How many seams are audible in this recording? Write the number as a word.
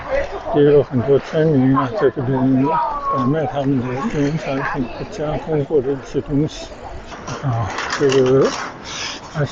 one